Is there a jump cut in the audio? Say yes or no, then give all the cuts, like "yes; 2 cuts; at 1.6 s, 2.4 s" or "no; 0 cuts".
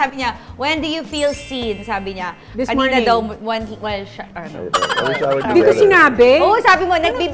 no; 0 cuts